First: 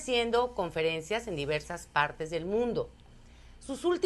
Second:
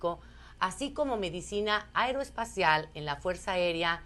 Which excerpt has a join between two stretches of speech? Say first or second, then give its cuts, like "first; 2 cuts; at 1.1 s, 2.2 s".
second; 1 cut; at 2.5 s